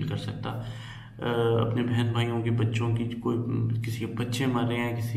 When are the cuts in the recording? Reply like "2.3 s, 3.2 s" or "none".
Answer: none

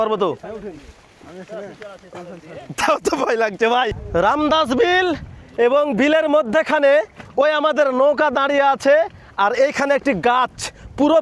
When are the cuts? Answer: none

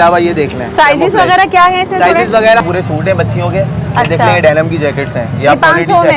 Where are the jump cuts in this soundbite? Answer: 2.6 s

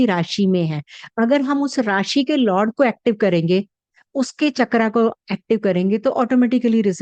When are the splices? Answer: none

